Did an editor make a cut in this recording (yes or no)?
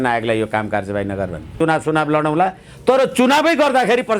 yes